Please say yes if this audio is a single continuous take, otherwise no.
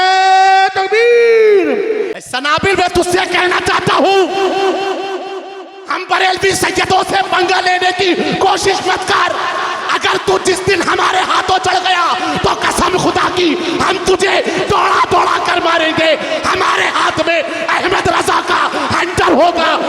no